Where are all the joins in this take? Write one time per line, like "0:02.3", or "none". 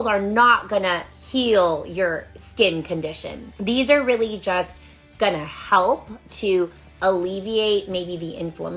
none